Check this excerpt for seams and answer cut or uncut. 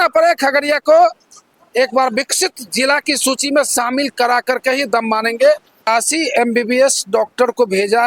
cut